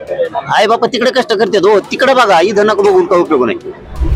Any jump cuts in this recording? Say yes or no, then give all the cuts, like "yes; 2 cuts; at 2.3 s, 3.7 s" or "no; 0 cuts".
no; 0 cuts